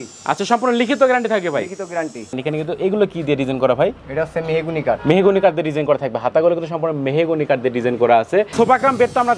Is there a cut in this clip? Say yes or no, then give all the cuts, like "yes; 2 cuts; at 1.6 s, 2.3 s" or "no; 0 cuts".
yes; 3 cuts; at 2.4 s, 4.0 s, 8.5 s